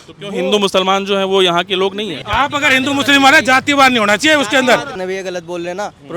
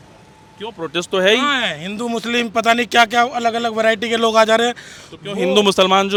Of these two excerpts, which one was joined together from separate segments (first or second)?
first